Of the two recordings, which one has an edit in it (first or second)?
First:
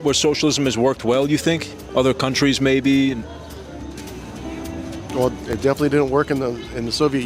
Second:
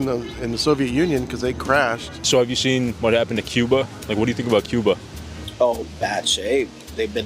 second